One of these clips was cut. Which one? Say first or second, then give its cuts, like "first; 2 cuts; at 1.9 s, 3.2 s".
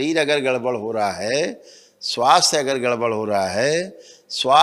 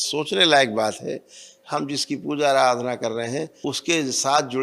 second; 1 cut; at 3.5 s